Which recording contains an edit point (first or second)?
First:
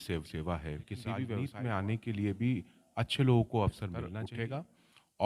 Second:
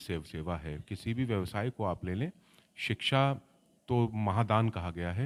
first